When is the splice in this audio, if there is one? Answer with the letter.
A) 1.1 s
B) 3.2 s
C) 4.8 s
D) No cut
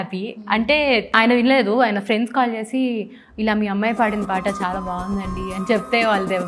A